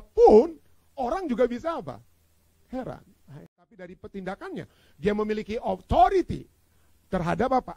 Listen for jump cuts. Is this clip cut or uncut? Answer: cut